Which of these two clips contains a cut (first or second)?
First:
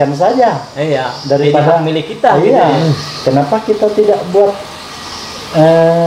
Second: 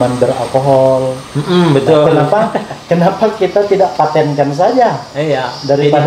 first